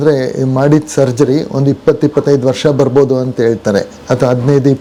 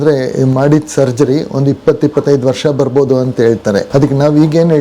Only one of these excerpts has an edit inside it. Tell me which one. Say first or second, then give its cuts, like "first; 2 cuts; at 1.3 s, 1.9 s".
second; 1 cut; at 3.9 s